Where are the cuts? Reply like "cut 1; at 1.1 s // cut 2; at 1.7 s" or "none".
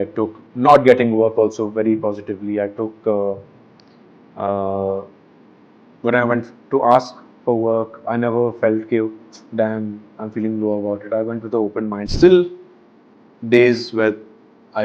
cut 1; at 12.0 s